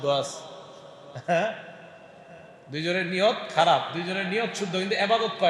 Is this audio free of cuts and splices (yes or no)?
yes